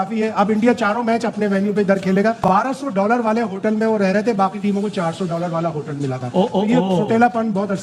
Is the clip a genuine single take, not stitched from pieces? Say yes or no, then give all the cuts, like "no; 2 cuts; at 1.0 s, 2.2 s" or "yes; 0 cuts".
no; 1 cut; at 2.4 s